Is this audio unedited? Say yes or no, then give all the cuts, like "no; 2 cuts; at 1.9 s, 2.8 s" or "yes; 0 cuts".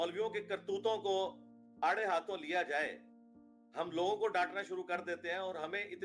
yes; 0 cuts